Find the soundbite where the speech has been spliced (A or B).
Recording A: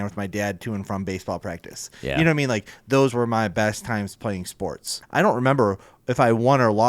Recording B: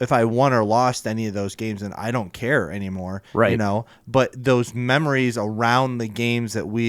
A